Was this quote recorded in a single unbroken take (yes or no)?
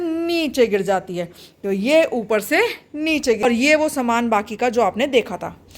no